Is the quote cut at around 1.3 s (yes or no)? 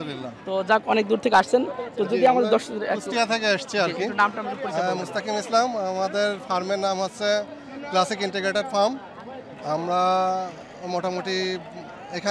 no